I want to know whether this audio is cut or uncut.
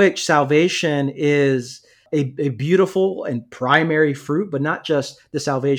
cut